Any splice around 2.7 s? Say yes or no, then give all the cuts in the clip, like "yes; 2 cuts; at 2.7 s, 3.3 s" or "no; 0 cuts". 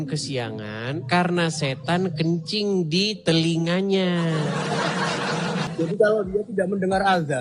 no; 1 cut; at 5.7 s